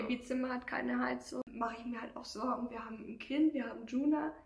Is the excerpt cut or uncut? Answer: cut